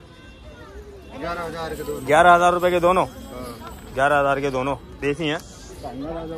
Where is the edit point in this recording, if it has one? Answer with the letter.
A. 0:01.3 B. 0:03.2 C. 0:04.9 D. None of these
D